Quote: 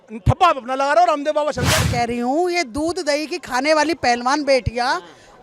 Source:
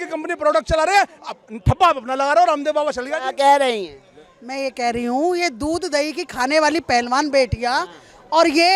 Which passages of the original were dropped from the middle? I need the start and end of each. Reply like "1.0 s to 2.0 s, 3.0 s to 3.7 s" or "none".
3.3 s to 4.7 s